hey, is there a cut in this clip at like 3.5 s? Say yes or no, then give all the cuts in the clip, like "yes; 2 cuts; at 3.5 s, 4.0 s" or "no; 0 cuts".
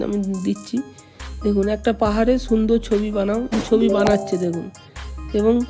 yes; 1 cut; at 3.5 s